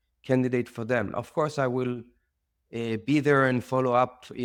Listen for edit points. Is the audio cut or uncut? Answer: uncut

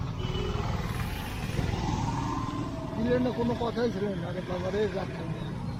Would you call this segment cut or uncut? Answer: uncut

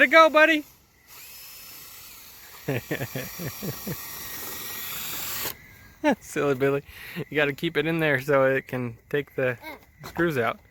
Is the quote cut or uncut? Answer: uncut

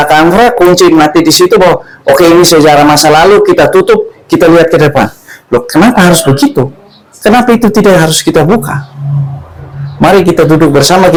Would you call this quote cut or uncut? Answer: uncut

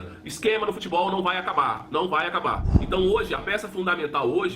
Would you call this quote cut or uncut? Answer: cut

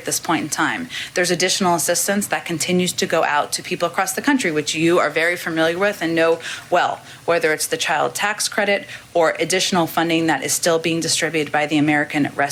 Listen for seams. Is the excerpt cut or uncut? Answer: uncut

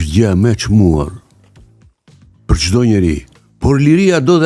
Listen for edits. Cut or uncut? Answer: cut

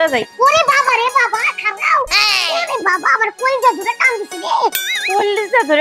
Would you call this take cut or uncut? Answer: uncut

